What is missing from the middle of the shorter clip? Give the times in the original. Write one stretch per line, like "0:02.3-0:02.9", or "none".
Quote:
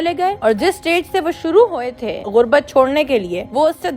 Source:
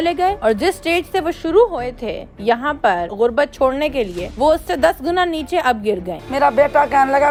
0:02.2-0:03.1